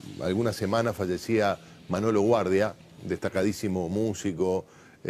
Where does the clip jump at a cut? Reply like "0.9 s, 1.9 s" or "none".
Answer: 4.2 s

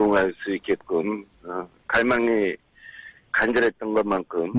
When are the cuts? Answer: 2.7 s

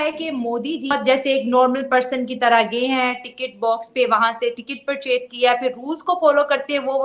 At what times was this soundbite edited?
0.9 s

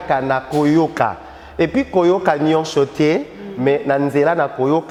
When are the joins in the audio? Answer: none

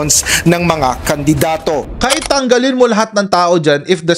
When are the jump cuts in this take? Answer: 1.8 s

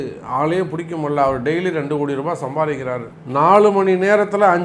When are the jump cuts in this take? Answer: 3.1 s

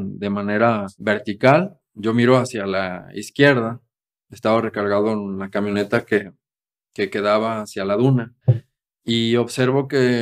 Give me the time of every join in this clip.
0.9 s, 1.8 s, 8.3 s

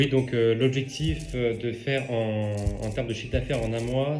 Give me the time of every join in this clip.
none

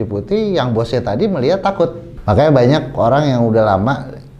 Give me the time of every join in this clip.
2.1 s

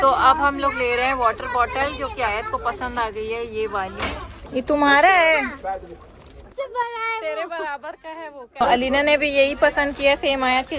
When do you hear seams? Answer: 4.4 s, 6.5 s, 8.6 s

